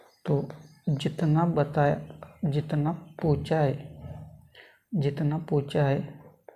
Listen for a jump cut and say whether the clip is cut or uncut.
uncut